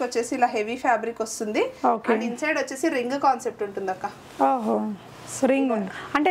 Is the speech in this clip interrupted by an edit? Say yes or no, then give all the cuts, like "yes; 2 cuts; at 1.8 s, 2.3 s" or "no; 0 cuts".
no; 0 cuts